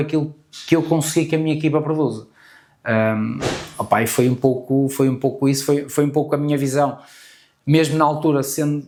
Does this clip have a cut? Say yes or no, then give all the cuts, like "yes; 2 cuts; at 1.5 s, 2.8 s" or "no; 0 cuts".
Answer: no; 0 cuts